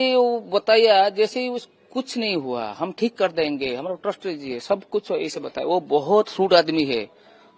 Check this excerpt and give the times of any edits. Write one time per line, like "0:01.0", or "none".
none

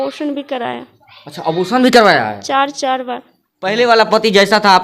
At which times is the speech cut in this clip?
0:03.7

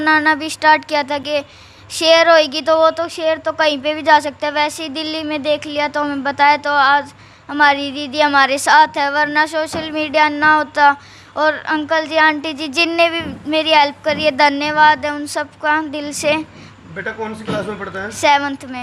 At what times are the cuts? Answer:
none

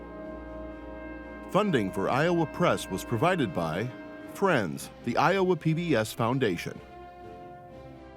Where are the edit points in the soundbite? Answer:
0:01.5

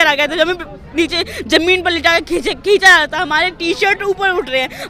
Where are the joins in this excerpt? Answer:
none

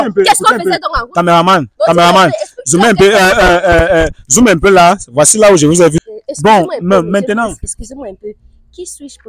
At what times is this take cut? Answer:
0:06.0

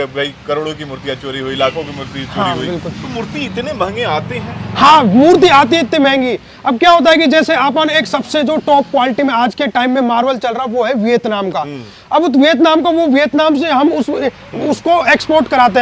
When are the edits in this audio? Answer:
none

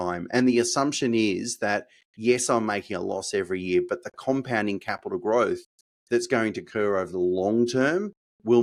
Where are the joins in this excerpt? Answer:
none

